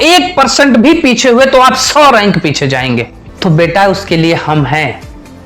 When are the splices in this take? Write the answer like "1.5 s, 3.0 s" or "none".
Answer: 3.2 s